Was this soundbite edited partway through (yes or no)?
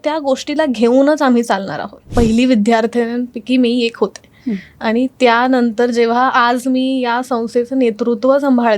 yes